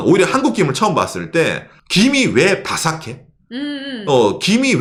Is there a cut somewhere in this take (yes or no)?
no